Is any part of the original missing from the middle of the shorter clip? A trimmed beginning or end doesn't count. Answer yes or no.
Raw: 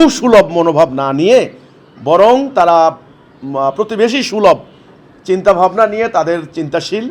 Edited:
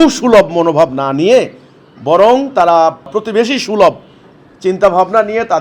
yes